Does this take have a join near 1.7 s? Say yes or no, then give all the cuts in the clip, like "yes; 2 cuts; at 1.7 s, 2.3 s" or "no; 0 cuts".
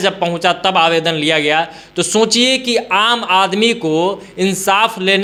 no; 0 cuts